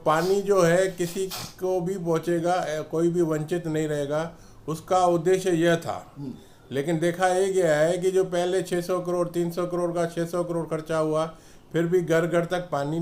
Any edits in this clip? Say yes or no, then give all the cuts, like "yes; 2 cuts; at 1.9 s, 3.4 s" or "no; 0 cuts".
no; 0 cuts